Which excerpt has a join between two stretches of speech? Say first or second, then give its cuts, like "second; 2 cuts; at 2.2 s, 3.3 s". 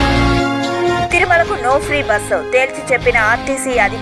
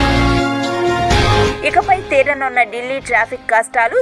first; 1 cut; at 1.0 s